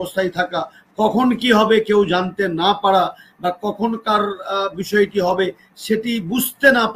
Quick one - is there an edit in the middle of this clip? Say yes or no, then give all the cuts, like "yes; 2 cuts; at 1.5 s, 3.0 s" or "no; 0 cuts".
no; 0 cuts